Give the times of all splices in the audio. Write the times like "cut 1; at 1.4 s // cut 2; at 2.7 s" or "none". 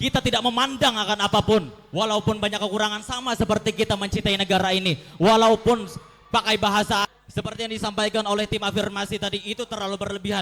cut 1; at 7.0 s

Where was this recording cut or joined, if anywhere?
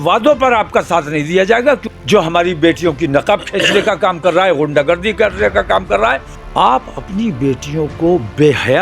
cut 1; at 1.9 s // cut 2; at 6.3 s

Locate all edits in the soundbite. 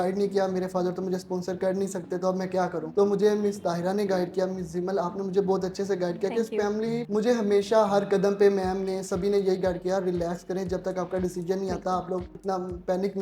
cut 1; at 7.0 s

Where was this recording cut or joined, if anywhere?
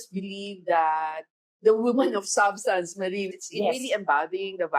cut 1; at 3.3 s

